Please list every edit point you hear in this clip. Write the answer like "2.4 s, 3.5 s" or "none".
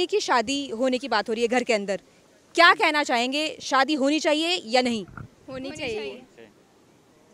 none